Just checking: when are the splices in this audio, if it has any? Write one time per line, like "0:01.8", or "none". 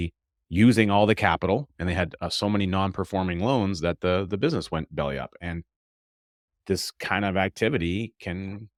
none